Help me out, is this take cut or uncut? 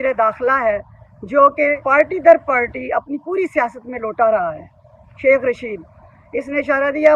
cut